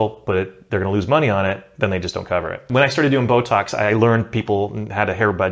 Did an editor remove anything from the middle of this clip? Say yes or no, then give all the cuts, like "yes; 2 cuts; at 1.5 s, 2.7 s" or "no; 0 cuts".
yes; 1 cut; at 2.7 s